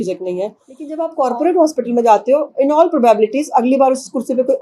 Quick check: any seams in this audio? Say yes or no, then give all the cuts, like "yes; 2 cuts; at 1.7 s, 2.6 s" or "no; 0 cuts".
yes; 1 cut; at 1.0 s